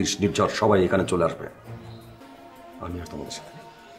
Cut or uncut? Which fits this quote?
cut